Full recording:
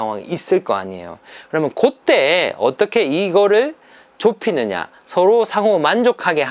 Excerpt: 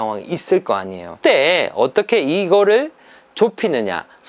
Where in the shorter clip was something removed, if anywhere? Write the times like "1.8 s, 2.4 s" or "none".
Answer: 1.1 s